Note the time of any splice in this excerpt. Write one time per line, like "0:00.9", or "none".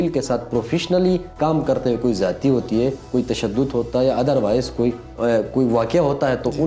0:01.3
0:03.0
0:05.1